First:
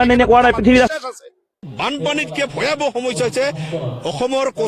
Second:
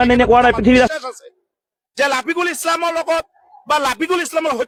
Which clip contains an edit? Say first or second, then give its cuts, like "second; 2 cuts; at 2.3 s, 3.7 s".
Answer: first; 1 cut; at 1.7 s